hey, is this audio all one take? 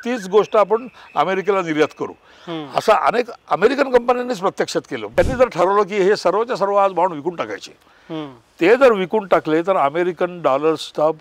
no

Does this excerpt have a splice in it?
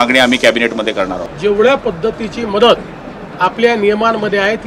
yes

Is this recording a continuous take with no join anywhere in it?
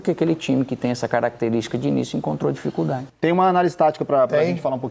no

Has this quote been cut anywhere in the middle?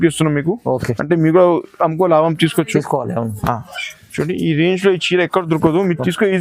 no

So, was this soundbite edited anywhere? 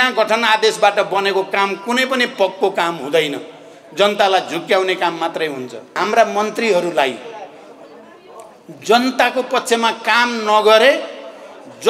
yes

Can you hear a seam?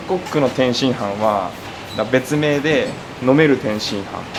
no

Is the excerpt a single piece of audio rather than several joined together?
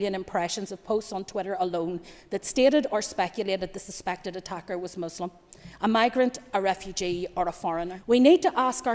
no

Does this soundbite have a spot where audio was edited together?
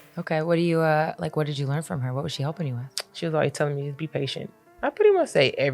yes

